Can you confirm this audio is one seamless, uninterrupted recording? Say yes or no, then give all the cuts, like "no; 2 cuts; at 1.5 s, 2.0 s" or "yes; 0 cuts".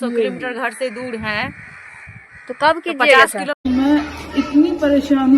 yes; 0 cuts